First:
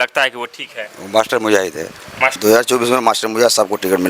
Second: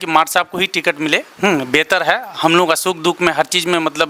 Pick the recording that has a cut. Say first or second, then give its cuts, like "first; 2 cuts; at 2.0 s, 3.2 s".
first; 1 cut; at 2.4 s